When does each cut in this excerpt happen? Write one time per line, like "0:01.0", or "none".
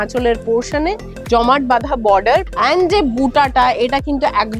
0:01.1
0:02.5